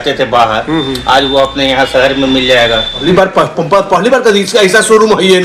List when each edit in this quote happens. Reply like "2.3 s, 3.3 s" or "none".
3.0 s